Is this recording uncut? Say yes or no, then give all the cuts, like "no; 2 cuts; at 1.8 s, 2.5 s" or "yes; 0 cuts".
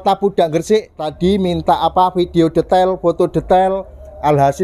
no; 1 cut; at 1.1 s